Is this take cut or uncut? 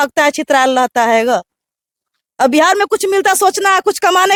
uncut